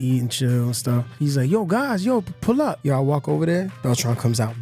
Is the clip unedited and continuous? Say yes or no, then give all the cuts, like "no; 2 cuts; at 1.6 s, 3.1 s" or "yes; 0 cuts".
no; 2 cuts; at 1.1 s, 2.8 s